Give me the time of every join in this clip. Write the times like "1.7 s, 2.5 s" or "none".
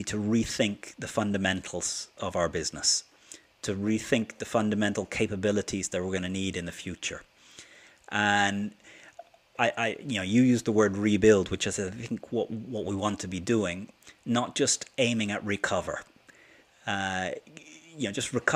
none